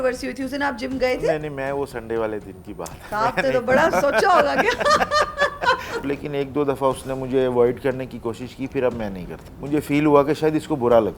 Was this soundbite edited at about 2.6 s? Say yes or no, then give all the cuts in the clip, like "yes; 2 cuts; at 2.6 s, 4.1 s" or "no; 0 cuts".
no; 2 cuts; at 6.1 s, 9.5 s